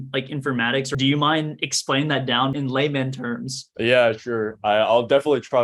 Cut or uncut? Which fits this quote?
cut